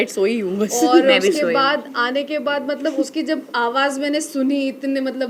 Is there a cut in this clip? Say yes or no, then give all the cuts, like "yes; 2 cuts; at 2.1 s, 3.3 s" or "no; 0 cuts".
no; 0 cuts